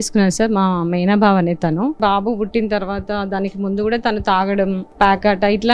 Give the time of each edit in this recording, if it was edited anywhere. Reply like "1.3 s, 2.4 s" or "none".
2.0 s, 4.8 s